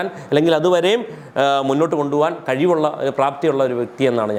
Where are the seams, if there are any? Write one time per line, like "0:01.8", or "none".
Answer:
none

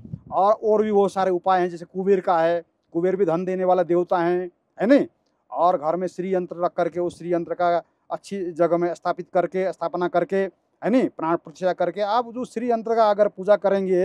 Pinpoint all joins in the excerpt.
none

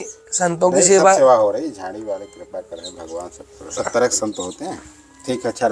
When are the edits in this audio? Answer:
0:03.7

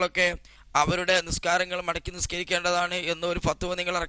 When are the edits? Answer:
none

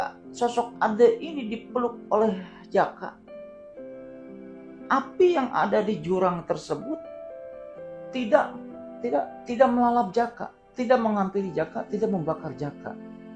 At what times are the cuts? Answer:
0:03.2
0:04.6

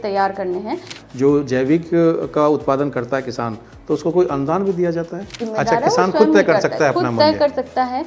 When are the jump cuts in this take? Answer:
0:01.0
0:05.4

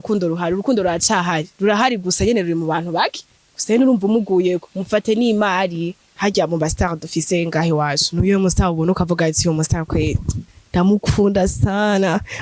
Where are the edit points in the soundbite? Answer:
none

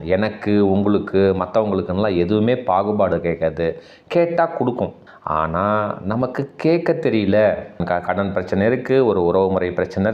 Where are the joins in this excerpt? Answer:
0:05.1
0:07.8

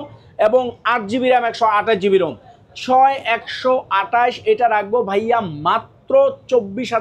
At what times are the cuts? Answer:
none

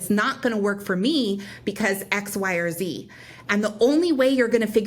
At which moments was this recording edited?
none

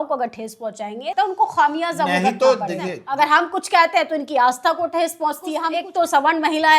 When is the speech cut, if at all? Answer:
0:01.1
0:03.0
0:05.7

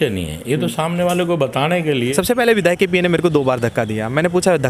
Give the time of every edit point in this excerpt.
0:02.0

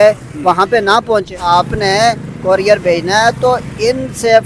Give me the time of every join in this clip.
0:01.4

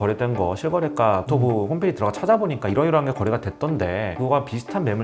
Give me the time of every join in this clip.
0:04.1

